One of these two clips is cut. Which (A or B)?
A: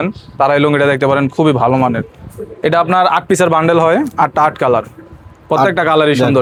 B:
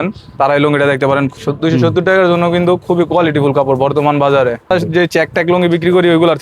B